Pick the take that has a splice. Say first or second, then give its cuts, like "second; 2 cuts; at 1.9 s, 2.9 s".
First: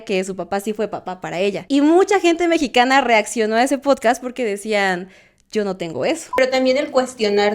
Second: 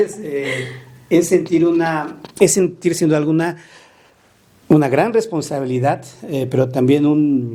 first; 2 cuts; at 1.6 s, 6.4 s